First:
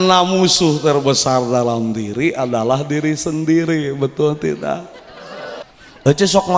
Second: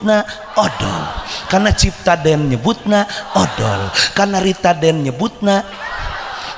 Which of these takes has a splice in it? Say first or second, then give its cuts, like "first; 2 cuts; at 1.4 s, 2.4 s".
first; 1 cut; at 5.6 s